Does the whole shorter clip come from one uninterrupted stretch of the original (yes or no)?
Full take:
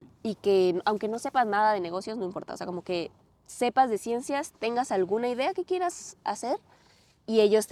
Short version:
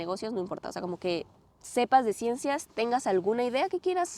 yes